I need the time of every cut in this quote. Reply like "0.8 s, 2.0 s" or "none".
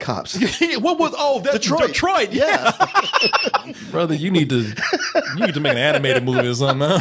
3.8 s

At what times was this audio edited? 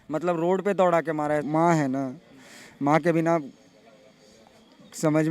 1.4 s

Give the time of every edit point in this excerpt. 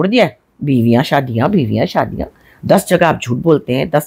none

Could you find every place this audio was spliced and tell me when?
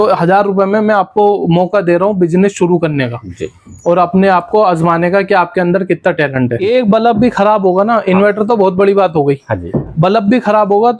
6.6 s

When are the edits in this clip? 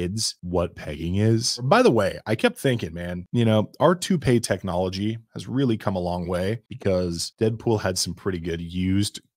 1.6 s

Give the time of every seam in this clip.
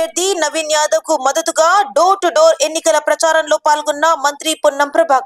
none

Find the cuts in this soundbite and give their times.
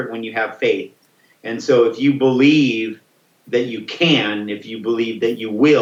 none

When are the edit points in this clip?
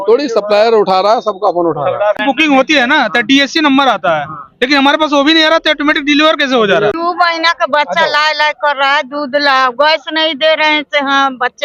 2.2 s, 6.9 s

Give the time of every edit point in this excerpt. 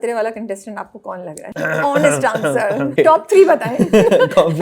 1.5 s, 2.9 s

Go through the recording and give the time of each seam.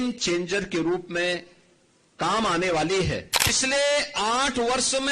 3.3 s

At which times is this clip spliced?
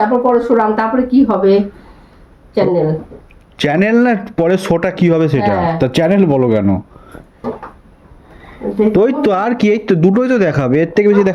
none

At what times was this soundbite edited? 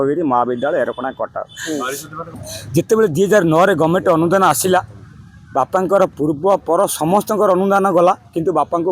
2.4 s

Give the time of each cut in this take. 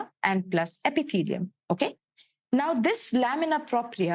none

